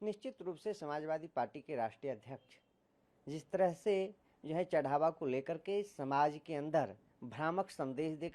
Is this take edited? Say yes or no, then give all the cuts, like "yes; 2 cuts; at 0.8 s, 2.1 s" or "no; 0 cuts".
no; 0 cuts